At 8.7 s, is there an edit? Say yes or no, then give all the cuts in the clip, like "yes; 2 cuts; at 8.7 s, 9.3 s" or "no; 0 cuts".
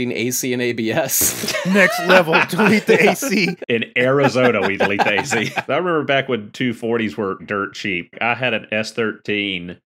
no; 4 cuts; at 1.7 s, 3.5 s, 5.6 s, 7.4 s